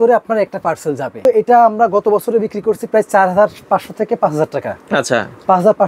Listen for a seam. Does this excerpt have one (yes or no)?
yes